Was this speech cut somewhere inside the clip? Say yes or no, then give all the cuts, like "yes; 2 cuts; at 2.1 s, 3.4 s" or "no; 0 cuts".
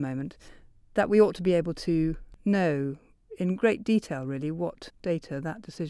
yes; 2 cuts; at 2.3 s, 4.9 s